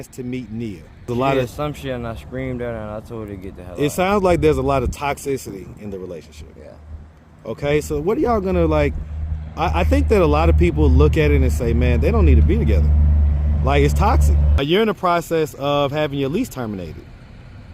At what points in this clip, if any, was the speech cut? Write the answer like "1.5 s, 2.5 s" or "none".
1.1 s, 14.5 s